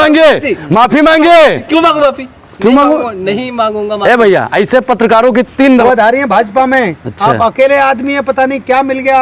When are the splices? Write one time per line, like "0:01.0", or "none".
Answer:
0:05.8